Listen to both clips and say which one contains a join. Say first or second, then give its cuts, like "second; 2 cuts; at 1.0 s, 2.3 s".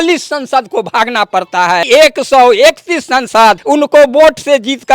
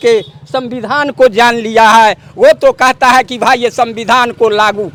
first; 2 cuts; at 1.8 s, 3.6 s